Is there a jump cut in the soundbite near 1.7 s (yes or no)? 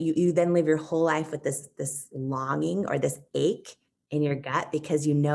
no